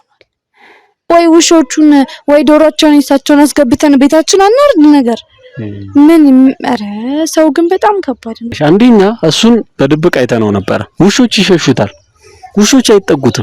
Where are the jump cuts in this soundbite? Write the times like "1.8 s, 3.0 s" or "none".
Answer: 0.9 s, 8.5 s